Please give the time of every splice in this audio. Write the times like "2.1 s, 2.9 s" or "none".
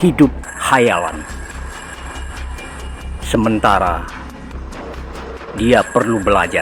1.6 s, 3.3 s, 4.1 s, 5.6 s